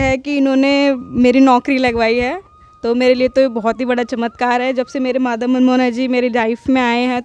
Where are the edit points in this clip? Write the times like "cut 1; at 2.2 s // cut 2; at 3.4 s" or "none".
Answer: none